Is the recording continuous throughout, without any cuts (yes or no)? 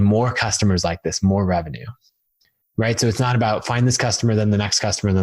yes